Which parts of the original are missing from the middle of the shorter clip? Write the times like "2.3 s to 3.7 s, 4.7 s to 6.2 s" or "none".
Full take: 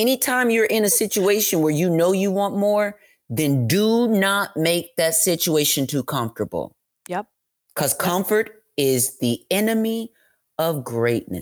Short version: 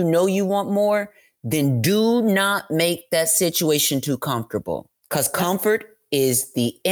6.8 s to 7.6 s